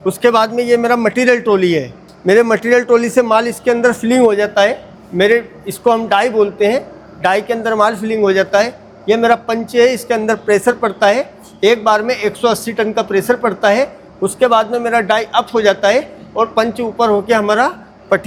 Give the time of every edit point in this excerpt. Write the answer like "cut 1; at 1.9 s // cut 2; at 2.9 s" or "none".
none